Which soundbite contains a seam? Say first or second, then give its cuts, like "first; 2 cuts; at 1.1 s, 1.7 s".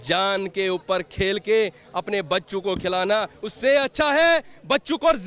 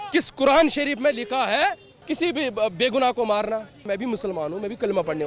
second; 2 cuts; at 1.9 s, 3.9 s